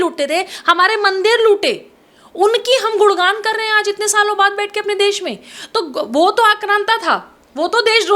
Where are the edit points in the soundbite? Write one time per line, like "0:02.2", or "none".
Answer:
none